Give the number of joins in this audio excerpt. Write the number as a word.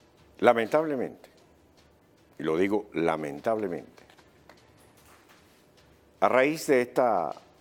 zero